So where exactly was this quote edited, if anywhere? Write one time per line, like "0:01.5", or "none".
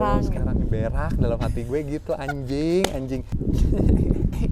0:03.3